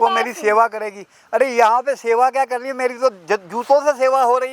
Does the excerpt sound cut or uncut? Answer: uncut